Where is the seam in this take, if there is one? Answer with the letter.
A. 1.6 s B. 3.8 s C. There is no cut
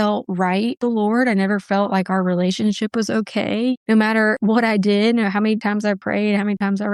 B